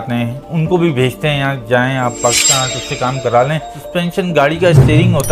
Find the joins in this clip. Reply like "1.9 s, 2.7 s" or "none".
3.8 s